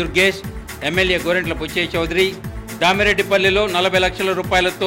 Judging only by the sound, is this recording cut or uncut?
uncut